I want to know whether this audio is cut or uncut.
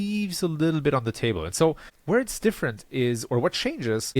cut